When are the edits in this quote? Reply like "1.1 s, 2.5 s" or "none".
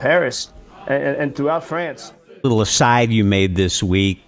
2.4 s